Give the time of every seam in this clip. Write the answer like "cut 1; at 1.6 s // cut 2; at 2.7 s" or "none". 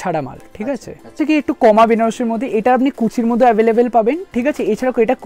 cut 1; at 1.1 s